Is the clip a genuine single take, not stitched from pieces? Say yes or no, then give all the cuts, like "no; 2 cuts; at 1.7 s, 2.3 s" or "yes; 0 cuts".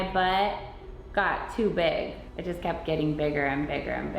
no; 1 cut; at 2.3 s